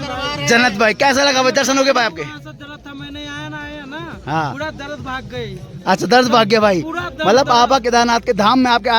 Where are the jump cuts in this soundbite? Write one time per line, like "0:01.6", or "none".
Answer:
none